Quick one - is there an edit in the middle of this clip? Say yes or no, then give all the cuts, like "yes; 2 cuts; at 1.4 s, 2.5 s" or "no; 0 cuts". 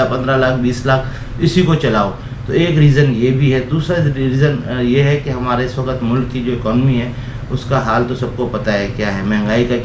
no; 0 cuts